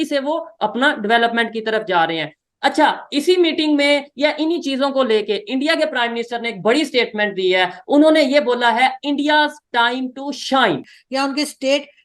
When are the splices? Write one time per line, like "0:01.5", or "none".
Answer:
0:10.9

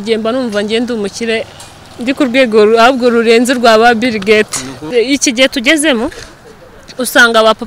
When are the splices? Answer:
0:04.8

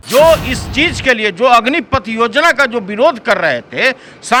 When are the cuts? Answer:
none

